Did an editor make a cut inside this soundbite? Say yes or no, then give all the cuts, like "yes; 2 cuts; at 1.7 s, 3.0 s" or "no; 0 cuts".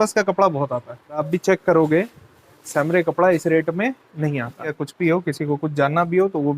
yes; 2 cuts; at 1.2 s, 4.8 s